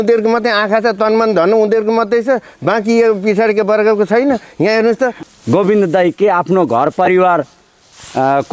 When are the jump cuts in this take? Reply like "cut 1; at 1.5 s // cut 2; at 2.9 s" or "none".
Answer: cut 1; at 5.2 s